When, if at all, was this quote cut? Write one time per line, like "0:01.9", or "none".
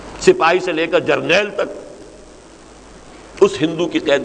none